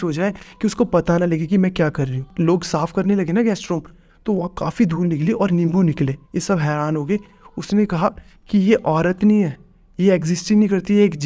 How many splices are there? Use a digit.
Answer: 2